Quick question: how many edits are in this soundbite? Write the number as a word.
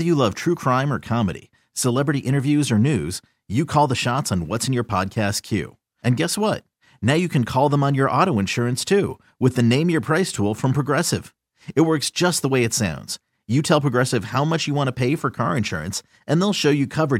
zero